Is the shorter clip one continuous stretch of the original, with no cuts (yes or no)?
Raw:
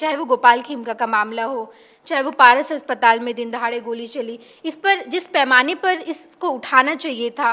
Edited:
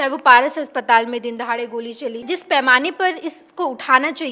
no